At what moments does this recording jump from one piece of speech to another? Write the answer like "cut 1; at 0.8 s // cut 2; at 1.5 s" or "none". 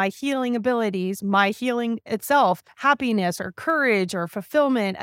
cut 1; at 2.7 s